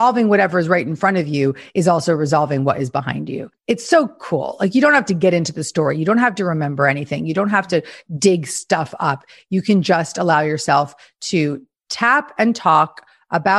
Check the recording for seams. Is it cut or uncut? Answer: cut